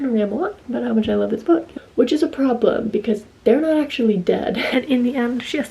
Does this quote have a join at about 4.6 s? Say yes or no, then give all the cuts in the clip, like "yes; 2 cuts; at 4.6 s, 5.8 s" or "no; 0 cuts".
yes; 2 cuts; at 1.7 s, 4.6 s